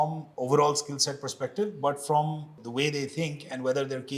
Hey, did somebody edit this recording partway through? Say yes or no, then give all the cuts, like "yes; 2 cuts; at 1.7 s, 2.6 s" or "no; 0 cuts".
no; 0 cuts